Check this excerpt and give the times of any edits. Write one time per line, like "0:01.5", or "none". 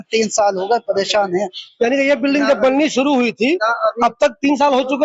none

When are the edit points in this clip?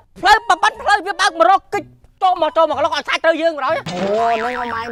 none

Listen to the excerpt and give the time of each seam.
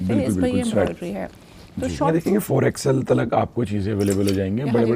0:02.0

